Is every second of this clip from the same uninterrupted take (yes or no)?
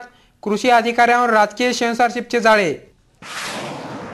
yes